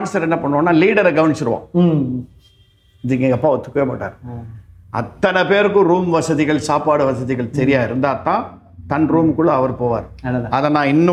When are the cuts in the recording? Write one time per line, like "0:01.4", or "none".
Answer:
none